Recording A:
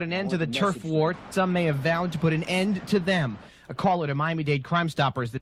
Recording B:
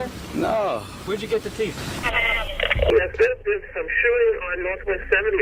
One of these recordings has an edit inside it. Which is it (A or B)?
B